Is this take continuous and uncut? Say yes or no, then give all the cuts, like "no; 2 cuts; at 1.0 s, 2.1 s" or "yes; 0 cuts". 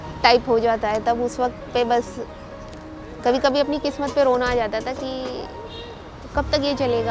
yes; 0 cuts